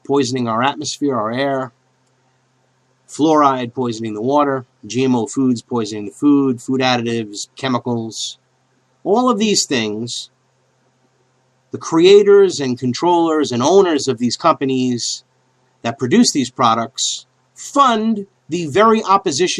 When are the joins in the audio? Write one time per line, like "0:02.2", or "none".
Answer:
0:04.8